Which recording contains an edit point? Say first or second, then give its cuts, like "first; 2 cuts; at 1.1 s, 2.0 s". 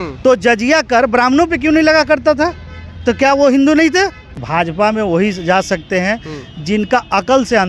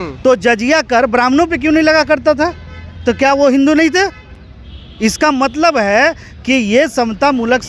first; 1 cut; at 4.4 s